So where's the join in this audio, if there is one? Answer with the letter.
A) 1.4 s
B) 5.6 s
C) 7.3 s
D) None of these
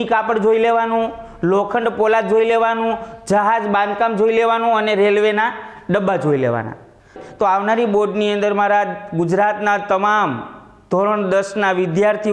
C